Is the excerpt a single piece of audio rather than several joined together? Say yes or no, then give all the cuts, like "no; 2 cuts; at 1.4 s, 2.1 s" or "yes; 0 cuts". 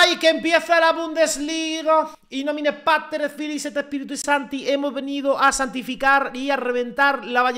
no; 1 cut; at 2.2 s